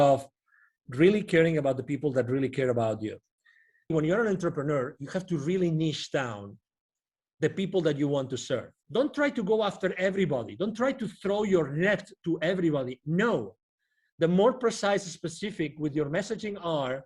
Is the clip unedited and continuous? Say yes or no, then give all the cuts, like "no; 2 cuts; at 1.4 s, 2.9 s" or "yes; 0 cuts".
no; 2 cuts; at 3.9 s, 8.8 s